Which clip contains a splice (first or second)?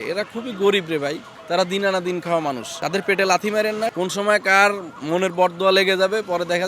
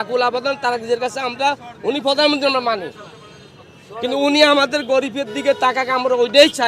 first